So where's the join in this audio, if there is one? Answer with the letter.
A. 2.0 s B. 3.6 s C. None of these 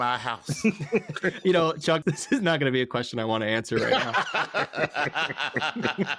A